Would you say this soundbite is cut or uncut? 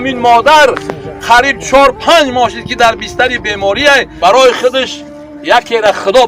cut